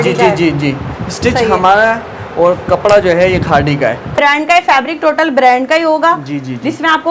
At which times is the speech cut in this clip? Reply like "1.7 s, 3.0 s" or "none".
4.1 s